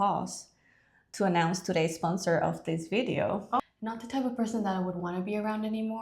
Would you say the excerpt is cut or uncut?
cut